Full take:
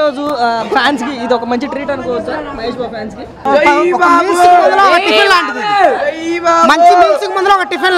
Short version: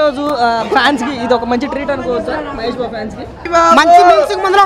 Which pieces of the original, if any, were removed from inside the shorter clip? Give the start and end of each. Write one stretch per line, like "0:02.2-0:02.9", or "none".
0:03.4-0:06.3